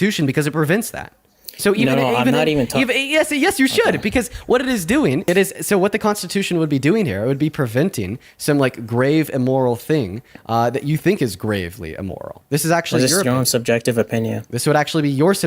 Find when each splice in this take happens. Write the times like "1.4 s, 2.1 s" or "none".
5.2 s, 12.3 s